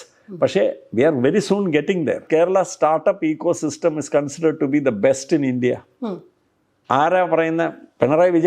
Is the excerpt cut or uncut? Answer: cut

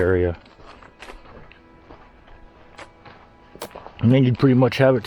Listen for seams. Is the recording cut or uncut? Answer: cut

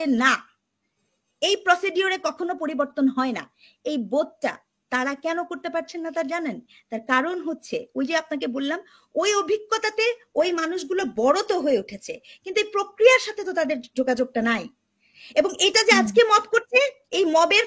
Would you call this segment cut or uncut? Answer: uncut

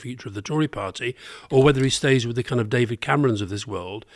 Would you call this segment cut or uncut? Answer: uncut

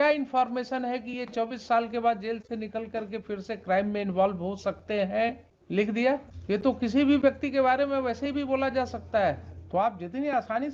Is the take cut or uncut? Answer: cut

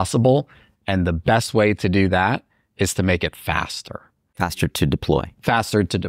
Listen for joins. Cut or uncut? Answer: cut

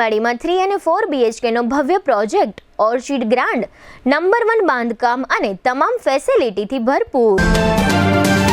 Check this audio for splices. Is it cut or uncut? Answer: cut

